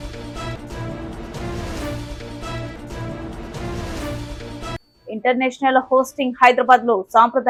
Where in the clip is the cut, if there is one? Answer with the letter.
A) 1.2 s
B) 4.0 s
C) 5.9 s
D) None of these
D